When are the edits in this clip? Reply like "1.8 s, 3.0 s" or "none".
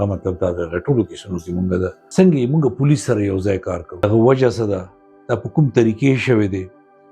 2.0 s, 4.0 s